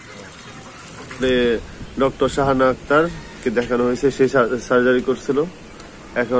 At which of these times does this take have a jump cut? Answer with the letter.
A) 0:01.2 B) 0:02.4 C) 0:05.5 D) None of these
A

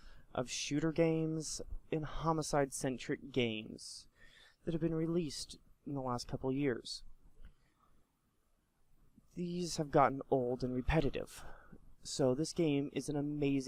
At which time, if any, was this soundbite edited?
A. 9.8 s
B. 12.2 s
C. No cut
C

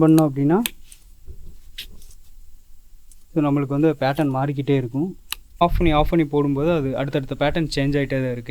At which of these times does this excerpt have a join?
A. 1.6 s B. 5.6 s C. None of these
B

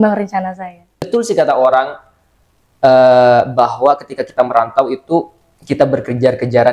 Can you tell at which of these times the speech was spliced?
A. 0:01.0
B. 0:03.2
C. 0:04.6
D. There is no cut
A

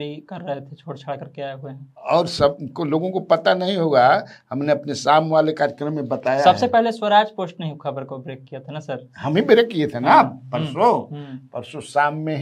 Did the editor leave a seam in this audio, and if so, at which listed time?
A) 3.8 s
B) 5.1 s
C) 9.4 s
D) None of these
D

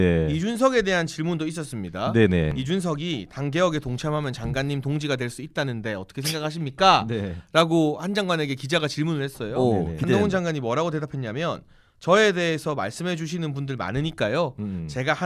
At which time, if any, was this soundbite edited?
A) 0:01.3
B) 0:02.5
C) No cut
B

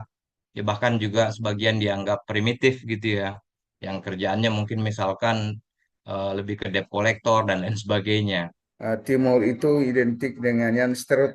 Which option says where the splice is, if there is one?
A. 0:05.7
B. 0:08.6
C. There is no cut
B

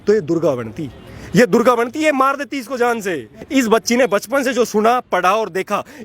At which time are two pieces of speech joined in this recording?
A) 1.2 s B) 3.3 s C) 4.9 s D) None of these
B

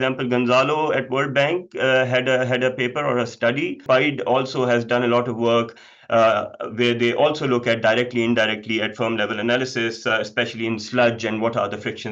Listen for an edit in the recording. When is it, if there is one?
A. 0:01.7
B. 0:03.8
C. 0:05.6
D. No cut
B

